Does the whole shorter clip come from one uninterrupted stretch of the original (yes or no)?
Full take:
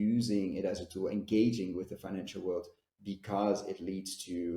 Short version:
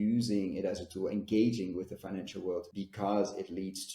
no